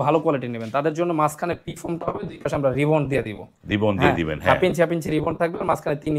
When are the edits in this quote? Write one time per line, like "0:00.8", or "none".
none